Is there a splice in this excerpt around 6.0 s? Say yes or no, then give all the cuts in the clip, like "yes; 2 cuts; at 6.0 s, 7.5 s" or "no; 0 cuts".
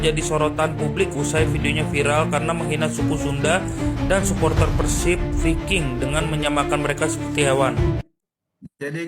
no; 1 cut; at 8.1 s